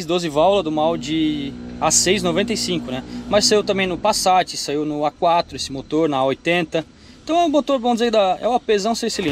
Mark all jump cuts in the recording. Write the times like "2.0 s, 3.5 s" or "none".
none